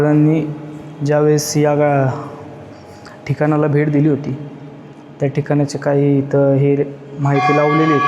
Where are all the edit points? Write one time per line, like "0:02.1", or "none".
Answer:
none